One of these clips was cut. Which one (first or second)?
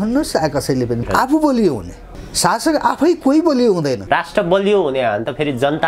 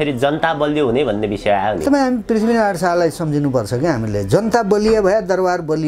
first